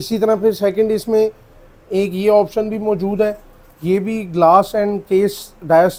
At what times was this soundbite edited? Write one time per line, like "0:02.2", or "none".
none